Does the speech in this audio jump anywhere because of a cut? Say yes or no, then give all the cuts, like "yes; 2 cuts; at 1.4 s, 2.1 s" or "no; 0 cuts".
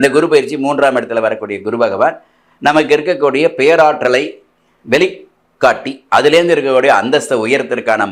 no; 0 cuts